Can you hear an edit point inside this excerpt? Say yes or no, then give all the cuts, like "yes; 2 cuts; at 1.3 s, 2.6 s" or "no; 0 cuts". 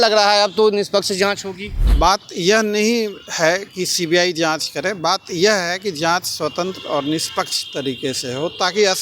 yes; 1 cut; at 1.9 s